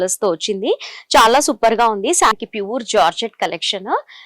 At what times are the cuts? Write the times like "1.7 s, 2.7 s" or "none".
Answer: 2.3 s